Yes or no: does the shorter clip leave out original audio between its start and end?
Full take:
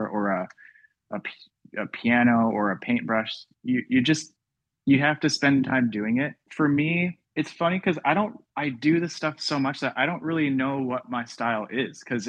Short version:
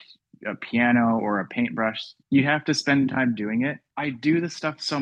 yes